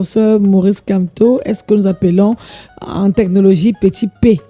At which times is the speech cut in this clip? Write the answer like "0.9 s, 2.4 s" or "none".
none